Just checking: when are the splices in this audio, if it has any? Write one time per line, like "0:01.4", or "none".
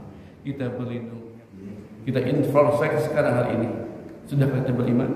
0:01.2

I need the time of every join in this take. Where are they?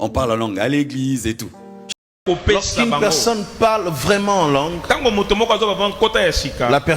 0:02.0

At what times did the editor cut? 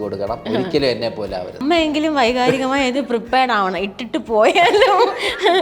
0:01.6

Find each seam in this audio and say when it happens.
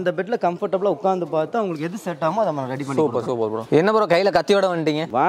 none

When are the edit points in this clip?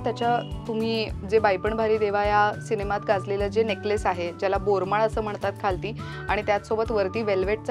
none

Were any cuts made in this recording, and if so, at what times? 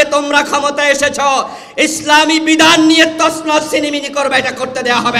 none

